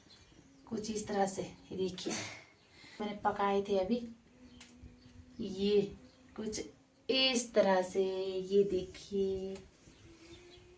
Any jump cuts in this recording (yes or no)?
yes